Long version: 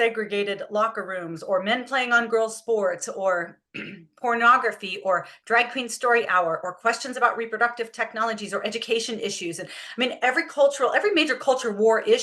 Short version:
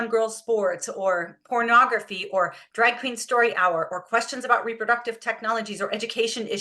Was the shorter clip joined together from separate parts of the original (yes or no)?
yes